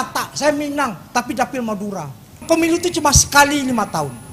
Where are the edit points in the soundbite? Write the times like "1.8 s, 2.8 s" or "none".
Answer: 2.4 s

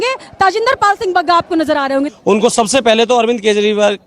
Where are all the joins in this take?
2.1 s

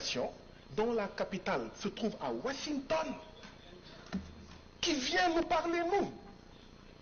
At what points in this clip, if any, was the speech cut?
none

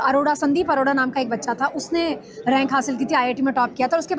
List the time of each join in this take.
none

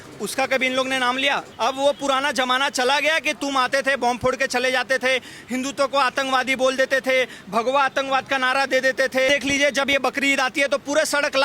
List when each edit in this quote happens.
1.5 s, 9.3 s

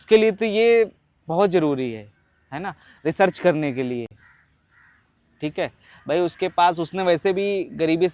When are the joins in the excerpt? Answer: none

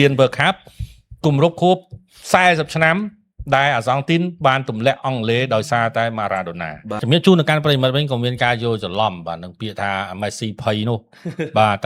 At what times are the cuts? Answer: 7.0 s

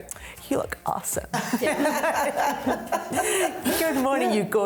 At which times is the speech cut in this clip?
none

